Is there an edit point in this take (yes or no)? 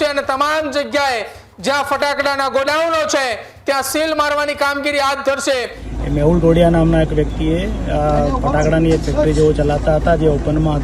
yes